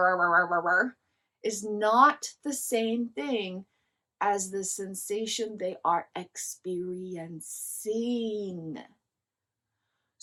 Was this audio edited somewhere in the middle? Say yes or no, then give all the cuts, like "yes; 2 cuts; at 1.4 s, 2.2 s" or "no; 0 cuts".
no; 0 cuts